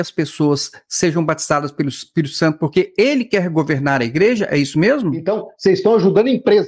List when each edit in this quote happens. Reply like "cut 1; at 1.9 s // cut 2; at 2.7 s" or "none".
cut 1; at 5.3 s